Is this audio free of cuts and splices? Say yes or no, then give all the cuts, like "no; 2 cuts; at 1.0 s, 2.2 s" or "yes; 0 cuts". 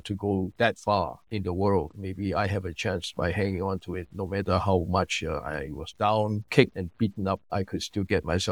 no; 3 cuts; at 1.2 s, 2.0 s, 6.6 s